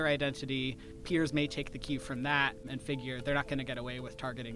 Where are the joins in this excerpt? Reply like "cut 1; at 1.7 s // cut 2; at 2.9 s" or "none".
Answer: cut 1; at 1.0 s // cut 2; at 2.7 s